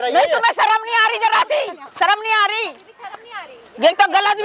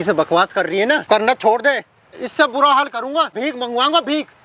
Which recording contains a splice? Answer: second; 3 cuts; at 1.0 s, 2.2 s, 3.3 s

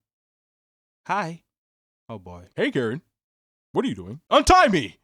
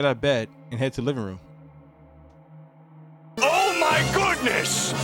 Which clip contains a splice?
first; 2 cuts; at 2.4 s, 4.1 s

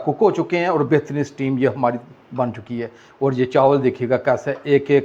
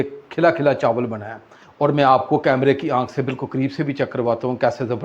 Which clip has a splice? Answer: second; 1 cut; at 1.6 s

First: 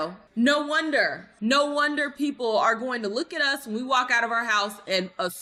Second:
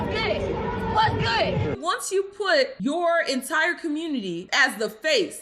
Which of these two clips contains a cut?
second; 1 cut; at 1.8 s

